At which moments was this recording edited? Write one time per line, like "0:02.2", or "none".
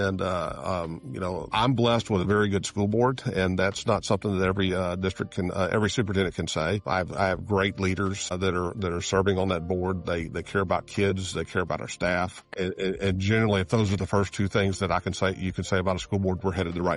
0:01.5
0:06.8
0:08.3
0:12.5